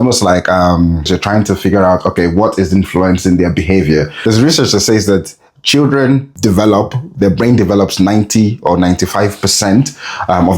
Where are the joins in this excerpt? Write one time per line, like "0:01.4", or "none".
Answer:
0:01.1
0:04.1
0:06.3